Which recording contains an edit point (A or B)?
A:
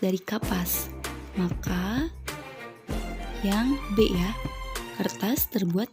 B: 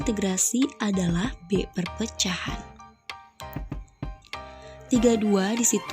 B